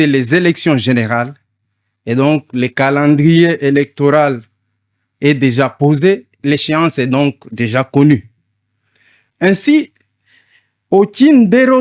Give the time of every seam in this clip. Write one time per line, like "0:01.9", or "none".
0:06.4